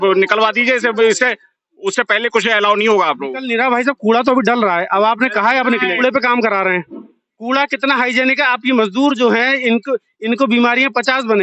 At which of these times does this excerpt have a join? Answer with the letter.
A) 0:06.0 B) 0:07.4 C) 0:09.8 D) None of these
A